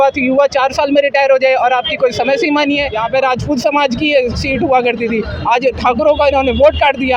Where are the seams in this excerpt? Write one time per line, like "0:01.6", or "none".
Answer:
0:02.9

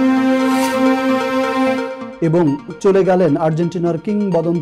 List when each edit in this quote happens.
0:02.0

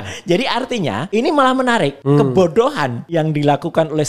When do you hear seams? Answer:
0:01.0
0:02.0
0:03.0

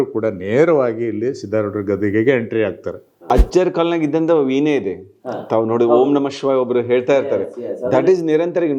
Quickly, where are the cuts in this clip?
0:03.3

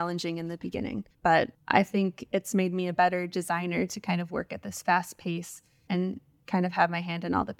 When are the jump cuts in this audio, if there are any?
0:01.4

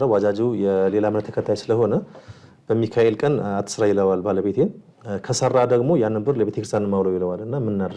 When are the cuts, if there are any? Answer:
none

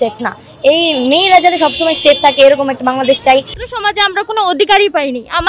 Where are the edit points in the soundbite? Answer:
0:03.6

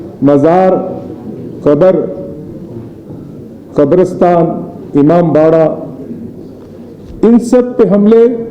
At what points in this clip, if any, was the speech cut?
none

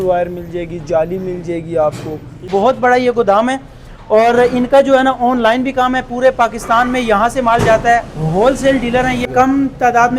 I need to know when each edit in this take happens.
0:02.5
0:09.3

